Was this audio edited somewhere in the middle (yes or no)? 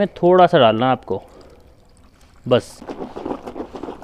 yes